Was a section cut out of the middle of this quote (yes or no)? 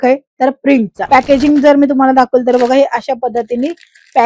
yes